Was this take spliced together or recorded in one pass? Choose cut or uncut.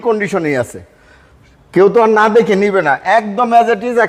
uncut